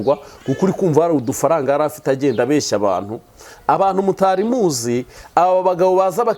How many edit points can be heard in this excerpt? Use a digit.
0